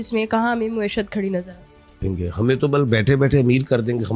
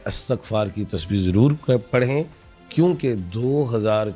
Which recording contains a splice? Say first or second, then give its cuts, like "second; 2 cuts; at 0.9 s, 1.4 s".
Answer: first; 1 cut; at 1.9 s